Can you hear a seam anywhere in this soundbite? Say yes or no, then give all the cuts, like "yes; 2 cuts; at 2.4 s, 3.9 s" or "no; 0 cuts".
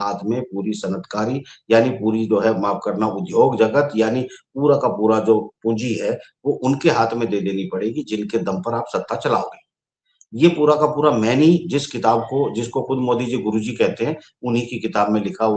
no; 0 cuts